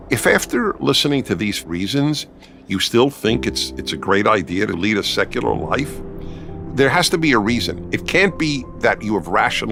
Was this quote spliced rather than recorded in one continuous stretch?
no; 0 cuts

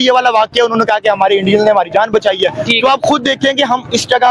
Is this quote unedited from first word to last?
yes; 0 cuts

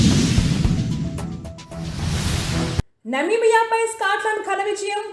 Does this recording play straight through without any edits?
yes; 0 cuts

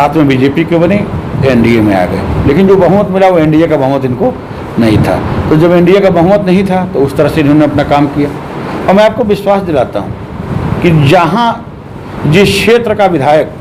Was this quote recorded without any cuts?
yes; 0 cuts

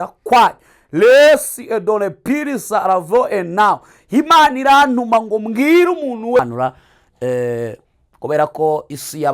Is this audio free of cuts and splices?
no; 1 cut; at 6.4 s

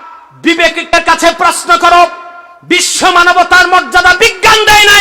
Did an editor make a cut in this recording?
yes; 1 cut; at 0.9 s

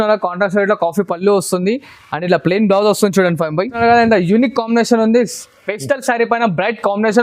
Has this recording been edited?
yes; 1 cut; at 3.8 s

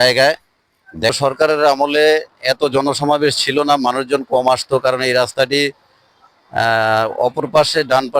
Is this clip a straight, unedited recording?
no; 1 cut; at 1.1 s

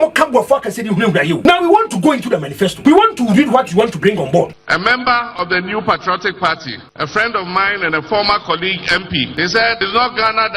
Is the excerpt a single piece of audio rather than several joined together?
no; 5 cuts; at 1.4 s, 2.8 s, 4.6 s, 6.8 s, 9.8 s

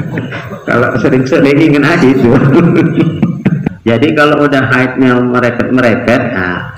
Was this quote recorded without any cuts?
no; 1 cut; at 3.7 s

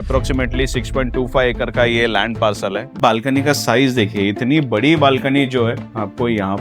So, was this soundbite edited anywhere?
yes; 1 cut; at 3.0 s

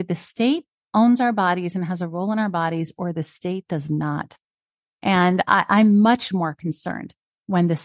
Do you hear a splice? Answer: no; 0 cuts

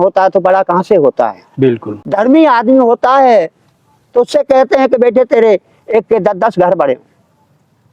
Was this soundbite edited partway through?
yes; 1 cut; at 1.9 s

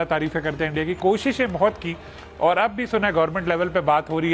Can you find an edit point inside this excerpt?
no; 0 cuts

